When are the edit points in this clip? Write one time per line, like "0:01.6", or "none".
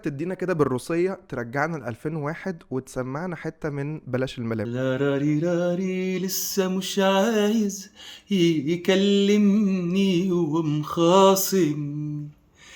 0:04.7